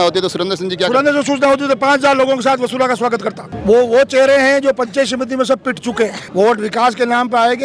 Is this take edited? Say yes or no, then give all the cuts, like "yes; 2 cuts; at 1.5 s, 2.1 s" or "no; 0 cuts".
yes; 2 cuts; at 3.5 s, 6.2 s